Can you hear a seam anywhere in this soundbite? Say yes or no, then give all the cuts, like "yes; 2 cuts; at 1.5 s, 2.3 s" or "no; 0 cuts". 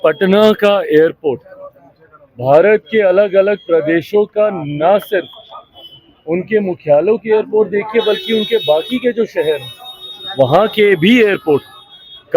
no; 0 cuts